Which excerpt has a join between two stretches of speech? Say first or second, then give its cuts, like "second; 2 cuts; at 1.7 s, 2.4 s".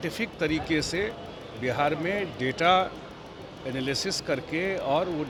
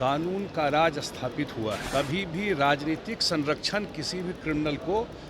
second; 1 cut; at 1.8 s